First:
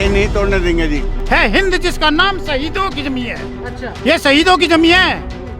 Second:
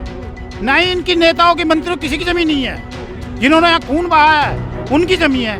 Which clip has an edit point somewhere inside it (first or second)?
first